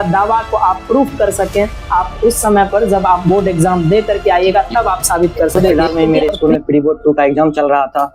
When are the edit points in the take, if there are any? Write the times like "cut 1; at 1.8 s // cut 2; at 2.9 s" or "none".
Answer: cut 1; at 5.7 s